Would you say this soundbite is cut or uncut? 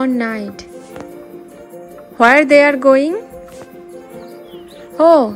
cut